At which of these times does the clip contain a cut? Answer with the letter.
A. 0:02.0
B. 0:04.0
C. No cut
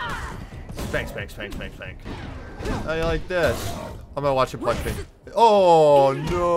A